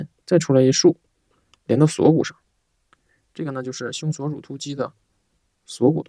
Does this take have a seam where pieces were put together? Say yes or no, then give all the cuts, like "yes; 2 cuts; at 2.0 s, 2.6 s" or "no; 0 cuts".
no; 0 cuts